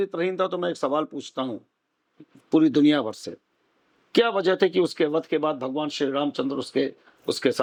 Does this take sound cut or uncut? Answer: uncut